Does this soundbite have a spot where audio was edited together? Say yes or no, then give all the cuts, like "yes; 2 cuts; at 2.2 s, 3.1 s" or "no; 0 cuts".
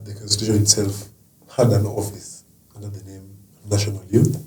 no; 0 cuts